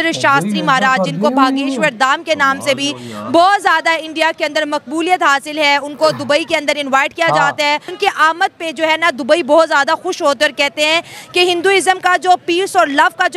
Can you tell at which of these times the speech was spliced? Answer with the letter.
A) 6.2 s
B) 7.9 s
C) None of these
B